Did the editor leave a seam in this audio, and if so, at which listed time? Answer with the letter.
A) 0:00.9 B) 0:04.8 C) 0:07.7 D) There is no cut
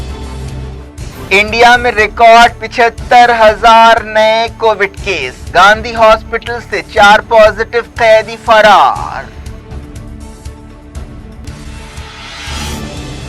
A